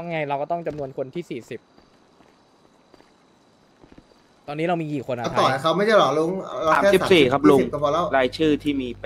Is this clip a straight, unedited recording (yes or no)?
yes